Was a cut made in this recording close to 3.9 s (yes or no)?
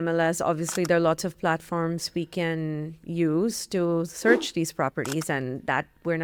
no